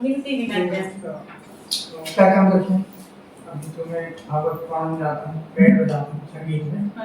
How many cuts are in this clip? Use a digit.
1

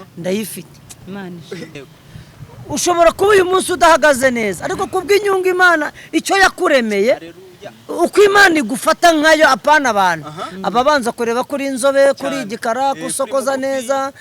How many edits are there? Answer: 1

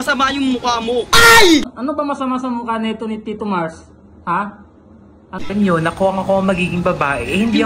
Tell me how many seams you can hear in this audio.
2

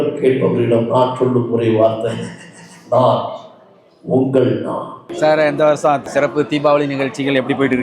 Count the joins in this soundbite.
2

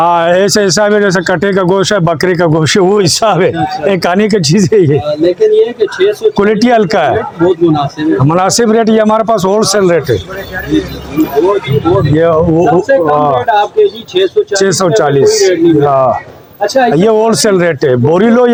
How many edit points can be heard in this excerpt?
0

